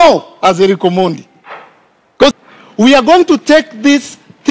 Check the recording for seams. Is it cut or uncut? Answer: cut